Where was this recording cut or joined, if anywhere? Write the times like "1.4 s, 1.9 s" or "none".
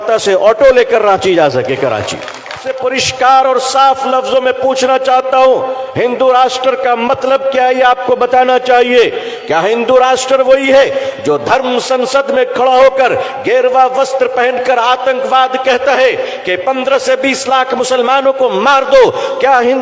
2.7 s